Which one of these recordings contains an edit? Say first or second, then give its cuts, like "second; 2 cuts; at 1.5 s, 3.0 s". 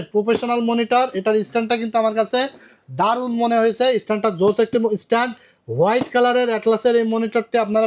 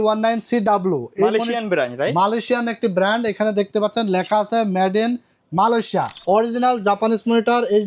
second; 1 cut; at 6.1 s